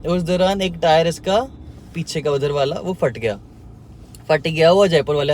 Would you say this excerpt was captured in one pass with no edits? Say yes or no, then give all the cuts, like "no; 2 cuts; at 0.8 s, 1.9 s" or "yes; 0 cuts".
yes; 0 cuts